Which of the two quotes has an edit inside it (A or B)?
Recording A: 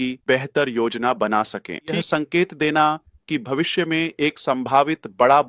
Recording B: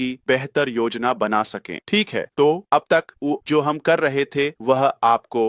A